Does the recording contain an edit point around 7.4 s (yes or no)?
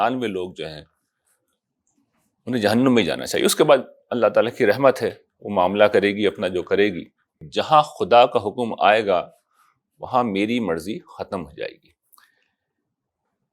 yes